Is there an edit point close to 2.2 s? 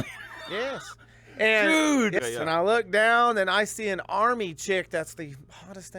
yes; 1 cut; at 2.2 s

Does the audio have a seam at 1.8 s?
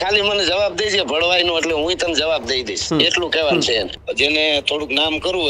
no; 1 cut; at 4.0 s

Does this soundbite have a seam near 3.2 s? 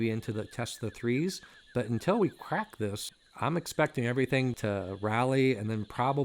no; 1 cut; at 4.5 s

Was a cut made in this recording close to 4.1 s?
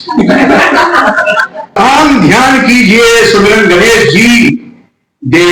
no; 1 cut; at 1.7 s

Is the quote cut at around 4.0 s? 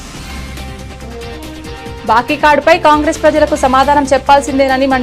no; 2 cuts; at 0.9 s, 1.9 s

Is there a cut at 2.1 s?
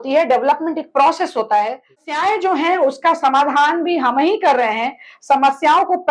yes; 1 cut; at 2.1 s

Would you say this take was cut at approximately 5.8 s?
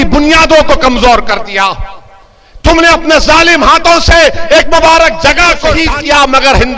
yes; 1 cut; at 5.8 s

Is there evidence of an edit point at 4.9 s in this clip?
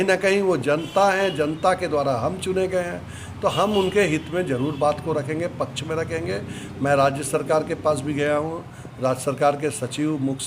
no; 1 cut; at 3.6 s

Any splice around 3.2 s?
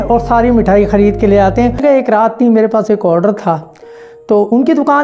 no; 1 cut; at 1.8 s

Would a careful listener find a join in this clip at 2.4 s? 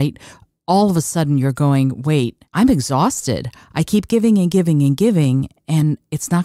yes; 1 cut; at 2.4 s

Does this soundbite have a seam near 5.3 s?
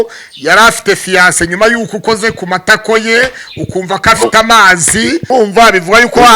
yes; 1 cut; at 5.3 s

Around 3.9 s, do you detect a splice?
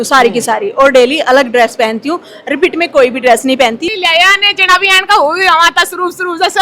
yes; 1 cut; at 3.9 s

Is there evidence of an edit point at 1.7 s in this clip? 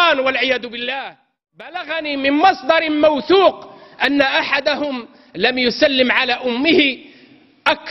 yes; 1 cut; at 1.7 s

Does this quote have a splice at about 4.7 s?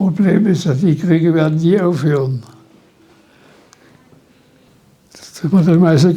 yes; 1 cut; at 4.7 s

